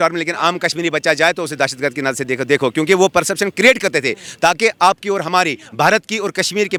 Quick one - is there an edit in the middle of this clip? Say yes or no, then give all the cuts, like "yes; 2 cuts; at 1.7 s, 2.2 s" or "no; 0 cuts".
no; 0 cuts